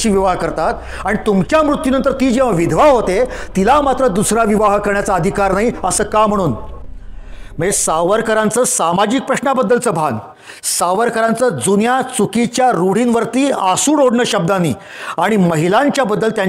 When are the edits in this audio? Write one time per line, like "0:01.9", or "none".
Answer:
none